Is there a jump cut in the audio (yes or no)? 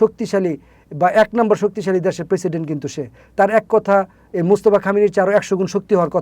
no